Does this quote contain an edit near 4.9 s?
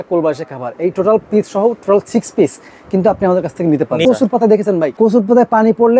yes; 2 cuts; at 4.0 s, 4.9 s

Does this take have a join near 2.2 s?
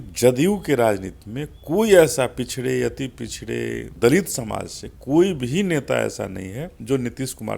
no; 2 cuts; at 3.9 s, 6.7 s

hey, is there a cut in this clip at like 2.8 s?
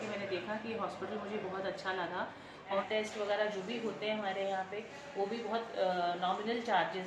yes; 1 cut; at 2.8 s

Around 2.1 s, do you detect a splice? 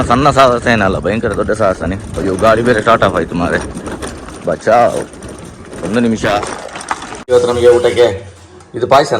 yes; 2 cuts; at 2.1 s, 7.3 s

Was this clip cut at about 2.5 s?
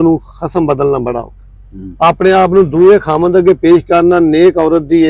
no; 0 cuts

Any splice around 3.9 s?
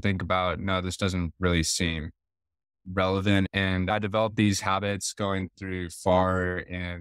yes; 1 cut; at 3.9 s

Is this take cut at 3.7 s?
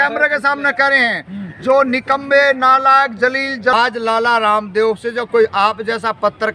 yes; 1 cut; at 3.7 s

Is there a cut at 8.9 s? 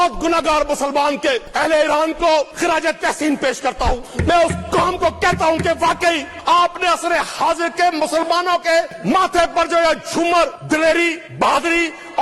yes; 7 cuts; at 1.5 s, 2.5 s, 4.1 s, 6.3 s, 8.9 s, 10.6 s, 11.2 s

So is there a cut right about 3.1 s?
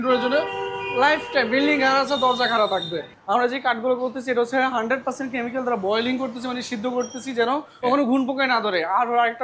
yes; 2 cuts; at 3.1 s, 7.8 s

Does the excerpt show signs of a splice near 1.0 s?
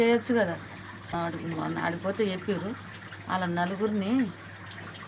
yes; 1 cut; at 1.0 s

